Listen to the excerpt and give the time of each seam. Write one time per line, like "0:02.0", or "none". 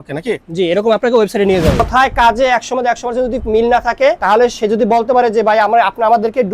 0:01.8
0:04.2

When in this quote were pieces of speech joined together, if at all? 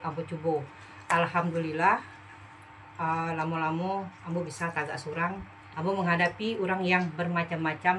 0:05.6

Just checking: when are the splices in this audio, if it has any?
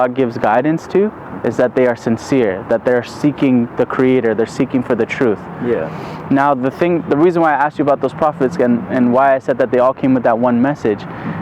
none

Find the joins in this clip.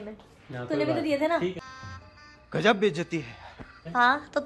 none

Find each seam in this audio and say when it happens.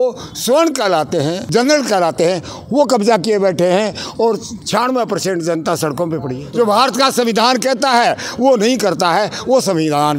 0:01.4
0:04.5
0:06.4

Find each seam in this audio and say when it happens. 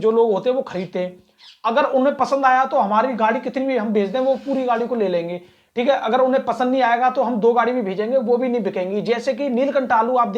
none

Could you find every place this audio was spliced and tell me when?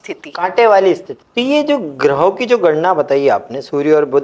0:01.2

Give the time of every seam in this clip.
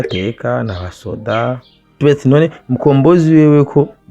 0:02.0

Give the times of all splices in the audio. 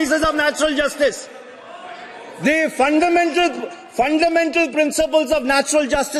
none

